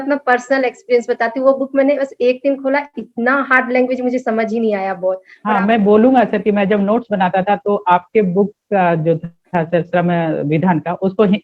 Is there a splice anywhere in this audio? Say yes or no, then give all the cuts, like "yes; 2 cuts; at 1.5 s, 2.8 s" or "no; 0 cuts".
yes; 1 cut; at 5.3 s